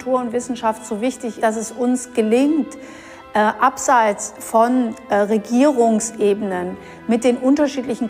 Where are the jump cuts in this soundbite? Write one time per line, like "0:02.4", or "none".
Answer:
0:01.4

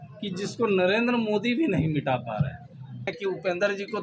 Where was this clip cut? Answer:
0:03.1

